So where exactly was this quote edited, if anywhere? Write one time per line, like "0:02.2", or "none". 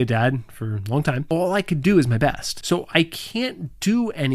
0:01.2
0:02.5